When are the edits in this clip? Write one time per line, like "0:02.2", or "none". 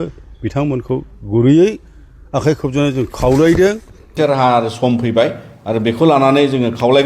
0:04.1